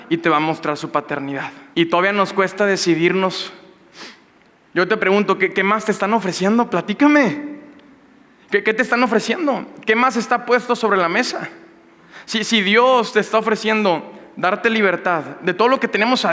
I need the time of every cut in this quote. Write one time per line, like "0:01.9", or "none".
0:01.5